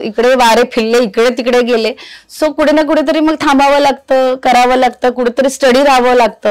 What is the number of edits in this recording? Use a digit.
0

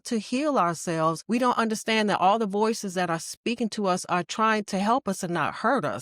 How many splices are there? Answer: 1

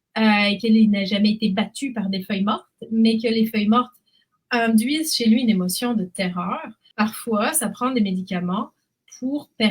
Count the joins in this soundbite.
1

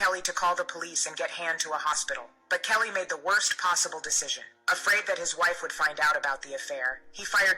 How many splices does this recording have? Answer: 0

